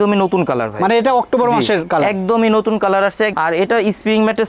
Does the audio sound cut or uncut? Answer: cut